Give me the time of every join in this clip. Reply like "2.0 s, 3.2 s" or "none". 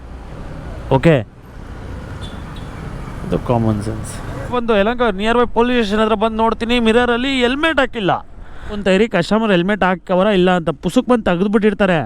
4.5 s, 8.8 s